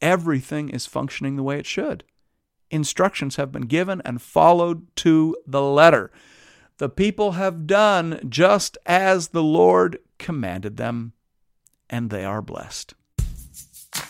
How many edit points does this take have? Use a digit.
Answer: 1